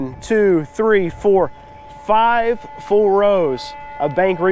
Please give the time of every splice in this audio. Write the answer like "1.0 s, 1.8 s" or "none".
none